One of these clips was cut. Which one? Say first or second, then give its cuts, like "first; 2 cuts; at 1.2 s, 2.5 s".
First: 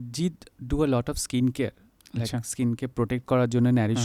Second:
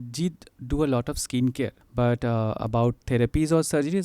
second; 1 cut; at 1.8 s